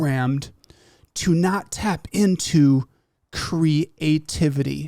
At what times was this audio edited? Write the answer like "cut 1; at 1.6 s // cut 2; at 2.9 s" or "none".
none